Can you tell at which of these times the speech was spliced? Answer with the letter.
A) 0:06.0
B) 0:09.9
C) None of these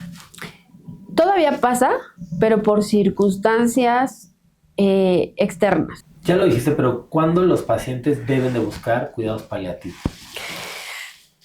A